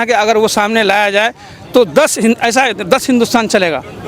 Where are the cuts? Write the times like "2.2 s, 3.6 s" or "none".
none